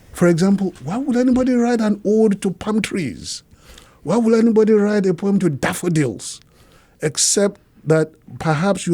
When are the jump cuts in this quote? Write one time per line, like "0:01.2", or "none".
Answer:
none